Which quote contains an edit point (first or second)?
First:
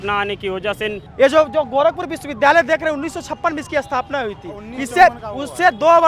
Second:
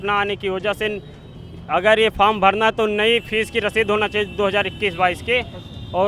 first